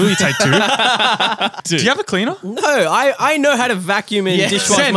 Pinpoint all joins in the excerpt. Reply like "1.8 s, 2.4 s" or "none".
1.6 s